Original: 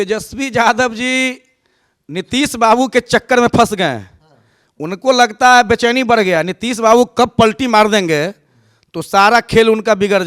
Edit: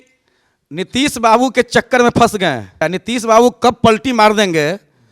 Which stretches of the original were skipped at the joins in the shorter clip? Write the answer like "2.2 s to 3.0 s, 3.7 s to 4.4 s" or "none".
4.2 s to 6.4 s